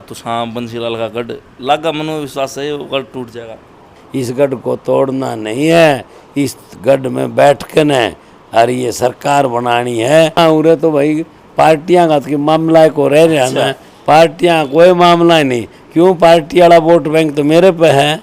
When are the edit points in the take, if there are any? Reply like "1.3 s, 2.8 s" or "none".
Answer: 3.9 s, 10.4 s